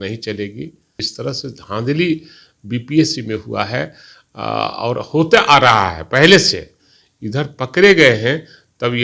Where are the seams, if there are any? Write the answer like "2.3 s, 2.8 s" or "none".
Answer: 1.0 s